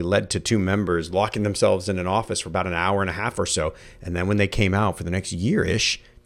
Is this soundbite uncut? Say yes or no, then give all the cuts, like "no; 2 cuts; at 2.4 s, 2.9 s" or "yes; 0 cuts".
yes; 0 cuts